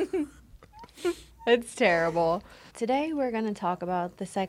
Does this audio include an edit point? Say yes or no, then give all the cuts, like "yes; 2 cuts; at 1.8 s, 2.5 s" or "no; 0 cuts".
yes; 1 cut; at 2.7 s